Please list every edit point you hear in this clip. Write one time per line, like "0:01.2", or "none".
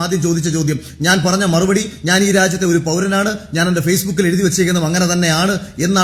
none